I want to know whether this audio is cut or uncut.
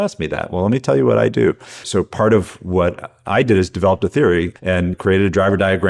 cut